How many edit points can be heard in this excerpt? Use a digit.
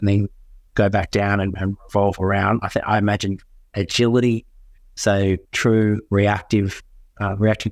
0